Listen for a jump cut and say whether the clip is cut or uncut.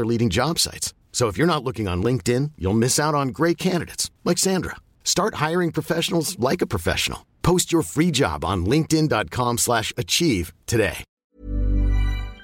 cut